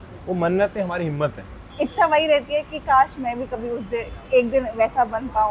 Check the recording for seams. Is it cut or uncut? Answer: cut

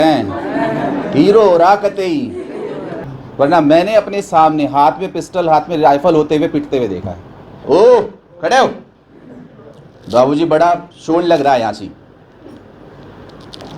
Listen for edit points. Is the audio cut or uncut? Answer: cut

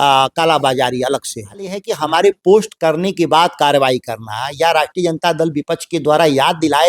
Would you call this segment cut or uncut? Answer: cut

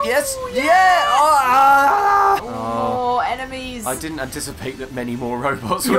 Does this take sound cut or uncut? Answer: cut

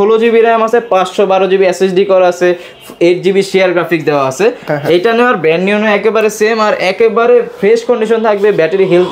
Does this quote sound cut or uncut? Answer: uncut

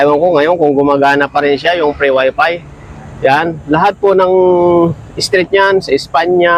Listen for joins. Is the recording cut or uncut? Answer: uncut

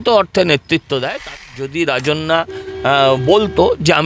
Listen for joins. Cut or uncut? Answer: cut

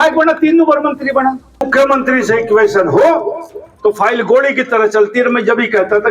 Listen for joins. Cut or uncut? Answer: cut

